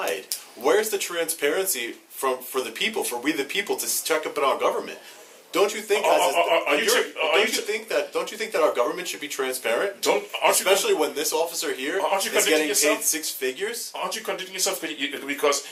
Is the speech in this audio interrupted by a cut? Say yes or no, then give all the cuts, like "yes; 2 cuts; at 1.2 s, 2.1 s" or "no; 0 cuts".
no; 0 cuts